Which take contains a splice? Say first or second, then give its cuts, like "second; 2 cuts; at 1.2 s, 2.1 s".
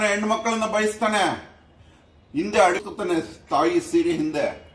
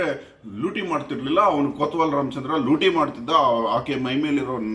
first; 1 cut; at 2.8 s